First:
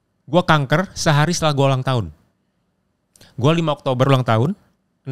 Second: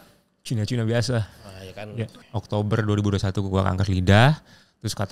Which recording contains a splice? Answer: second; 1 cut; at 2.2 s

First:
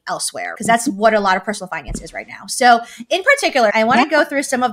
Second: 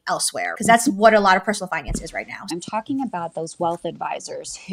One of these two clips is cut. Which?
second; 1 cut; at 2.5 s

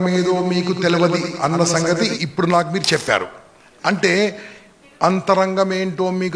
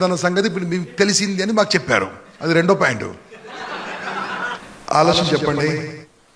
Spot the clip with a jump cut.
second; 1 cut; at 4.6 s

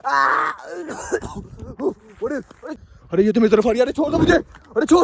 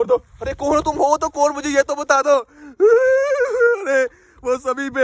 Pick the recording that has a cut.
first; 1 cut; at 2.7 s

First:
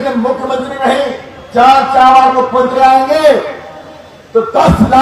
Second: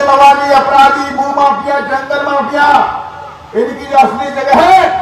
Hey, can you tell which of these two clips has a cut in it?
first; 1 cut; at 2.8 s

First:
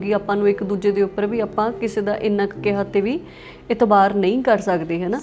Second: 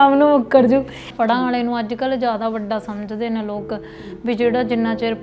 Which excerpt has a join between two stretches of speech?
second; 1 cut; at 1.0 s

